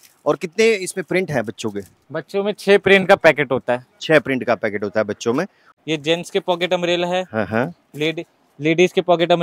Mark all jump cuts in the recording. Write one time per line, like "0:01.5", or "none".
0:05.6